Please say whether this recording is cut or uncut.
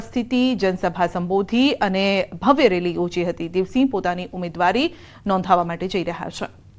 cut